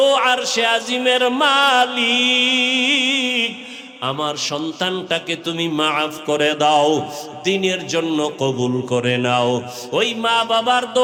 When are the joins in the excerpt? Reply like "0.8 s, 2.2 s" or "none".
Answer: none